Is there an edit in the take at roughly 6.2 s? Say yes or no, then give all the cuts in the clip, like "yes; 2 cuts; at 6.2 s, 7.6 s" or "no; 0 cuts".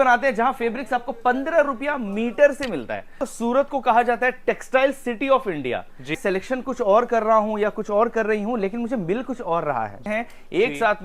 yes; 3 cuts; at 3.2 s, 6.2 s, 10.0 s